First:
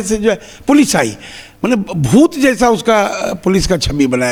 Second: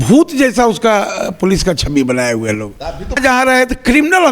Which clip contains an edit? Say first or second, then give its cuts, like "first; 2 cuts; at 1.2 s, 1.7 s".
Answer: second; 1 cut; at 3.2 s